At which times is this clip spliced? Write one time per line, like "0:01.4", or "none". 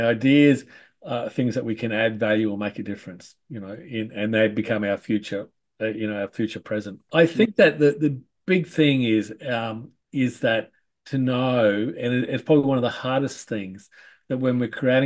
0:07.0